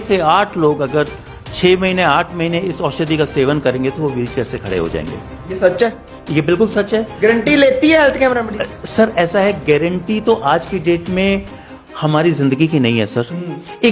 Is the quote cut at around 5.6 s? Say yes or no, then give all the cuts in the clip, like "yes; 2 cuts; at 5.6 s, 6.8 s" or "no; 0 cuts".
no; 0 cuts